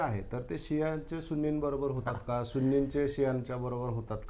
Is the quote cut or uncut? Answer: uncut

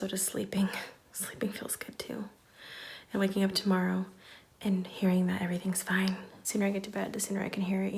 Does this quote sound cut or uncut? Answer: cut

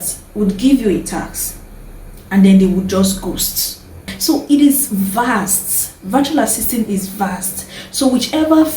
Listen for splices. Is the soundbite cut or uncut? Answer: cut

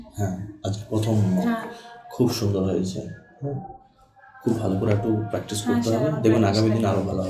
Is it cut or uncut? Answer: uncut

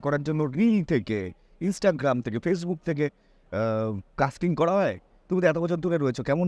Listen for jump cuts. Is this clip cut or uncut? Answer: uncut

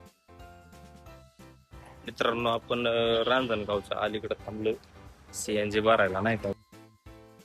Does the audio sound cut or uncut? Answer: cut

